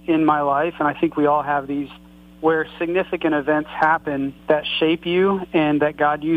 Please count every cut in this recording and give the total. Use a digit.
1